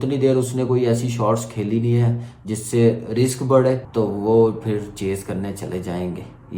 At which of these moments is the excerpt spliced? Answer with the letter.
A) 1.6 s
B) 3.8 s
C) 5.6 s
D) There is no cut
B